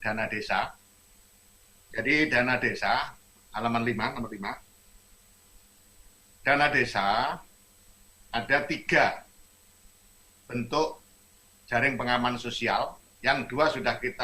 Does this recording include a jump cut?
yes; 1 cut; at 12.6 s

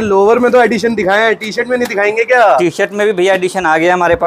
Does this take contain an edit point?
no; 0 cuts

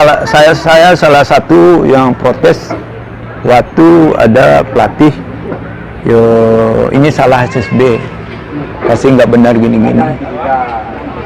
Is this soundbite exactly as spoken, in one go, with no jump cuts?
yes; 0 cuts

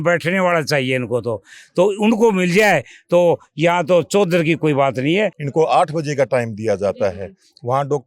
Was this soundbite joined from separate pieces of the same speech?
yes; 1 cut; at 5.4 s

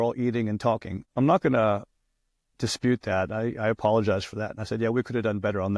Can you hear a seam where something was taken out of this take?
no; 0 cuts

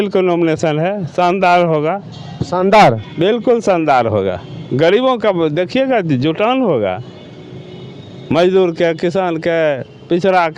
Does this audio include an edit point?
no; 0 cuts

